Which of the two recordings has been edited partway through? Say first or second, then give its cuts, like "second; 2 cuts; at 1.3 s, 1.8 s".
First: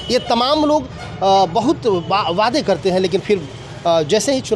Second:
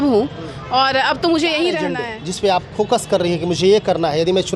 second; 1 cut; at 2.1 s